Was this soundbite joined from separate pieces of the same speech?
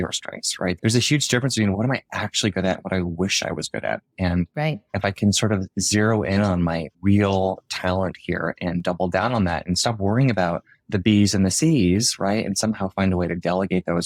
no; 0 cuts

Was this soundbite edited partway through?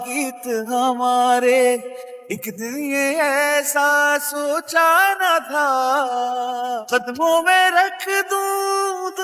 no; 0 cuts

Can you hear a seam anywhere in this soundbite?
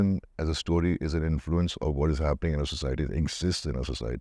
no; 0 cuts

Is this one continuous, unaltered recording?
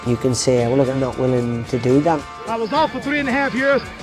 no; 2 cuts; at 0.9 s, 2.2 s

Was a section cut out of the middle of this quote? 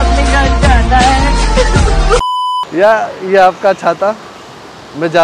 yes; 1 cut; at 2.4 s

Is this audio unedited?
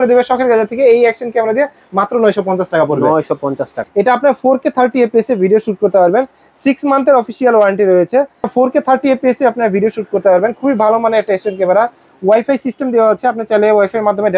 no; 2 cuts; at 3.8 s, 8.5 s

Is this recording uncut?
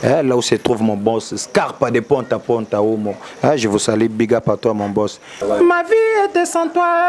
no; 1 cut; at 5.4 s

